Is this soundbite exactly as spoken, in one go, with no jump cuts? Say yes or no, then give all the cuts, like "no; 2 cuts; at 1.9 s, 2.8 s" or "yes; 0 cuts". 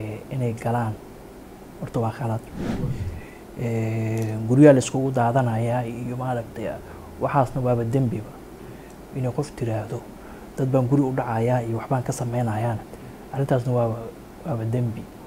yes; 0 cuts